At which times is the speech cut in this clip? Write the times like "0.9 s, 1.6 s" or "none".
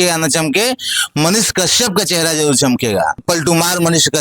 3.2 s